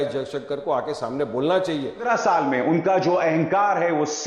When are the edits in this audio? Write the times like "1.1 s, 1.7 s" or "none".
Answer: 2.1 s